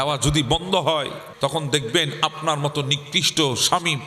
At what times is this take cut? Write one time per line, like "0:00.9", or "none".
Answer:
0:01.2